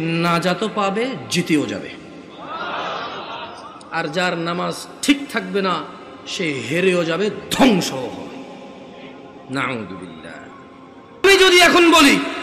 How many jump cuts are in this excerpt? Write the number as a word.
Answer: one